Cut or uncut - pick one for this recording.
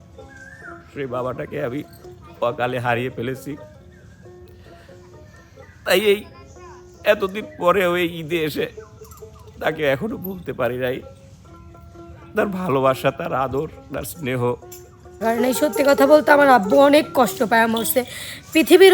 cut